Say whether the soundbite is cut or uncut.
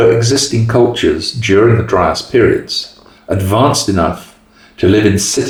uncut